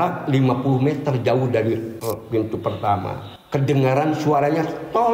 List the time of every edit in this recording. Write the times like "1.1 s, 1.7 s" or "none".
1.9 s, 3.3 s